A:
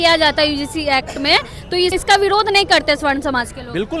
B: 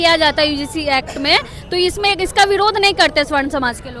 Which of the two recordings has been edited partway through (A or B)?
A